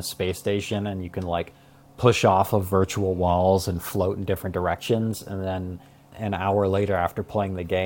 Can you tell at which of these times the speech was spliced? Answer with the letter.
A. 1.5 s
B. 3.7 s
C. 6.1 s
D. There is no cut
C